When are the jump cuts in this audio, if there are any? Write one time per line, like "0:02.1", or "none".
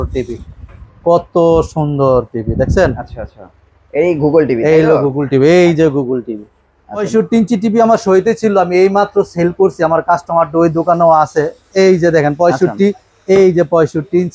0:07.0